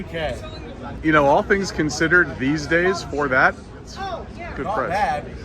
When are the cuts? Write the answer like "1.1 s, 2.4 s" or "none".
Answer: 0.9 s